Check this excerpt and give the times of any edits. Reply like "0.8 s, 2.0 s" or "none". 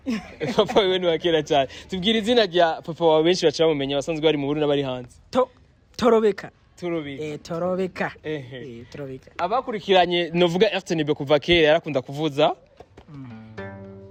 none